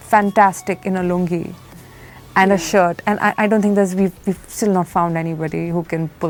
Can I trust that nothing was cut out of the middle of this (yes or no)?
yes